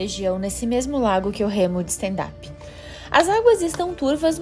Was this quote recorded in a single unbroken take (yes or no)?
yes